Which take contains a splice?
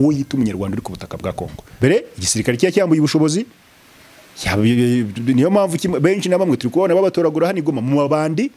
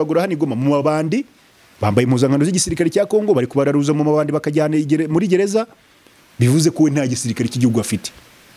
first; 1 cut; at 1.8 s

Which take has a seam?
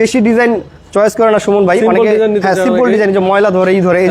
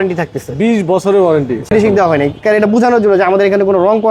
second; 1 cut; at 1.7 s

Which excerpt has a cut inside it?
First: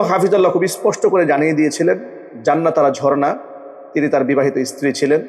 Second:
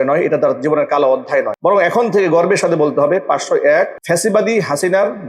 second; 2 cuts; at 1.5 s, 4.0 s

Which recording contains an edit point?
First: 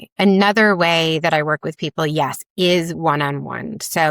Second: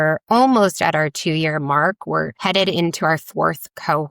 second; 1 cut; at 2.3 s

